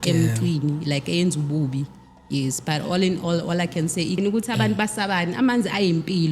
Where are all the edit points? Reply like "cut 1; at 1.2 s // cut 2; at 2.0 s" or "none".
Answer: cut 1; at 4.2 s